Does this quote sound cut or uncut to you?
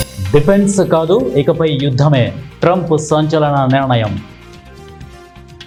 uncut